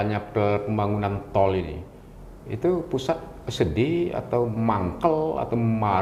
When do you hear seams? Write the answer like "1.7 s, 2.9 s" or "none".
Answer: none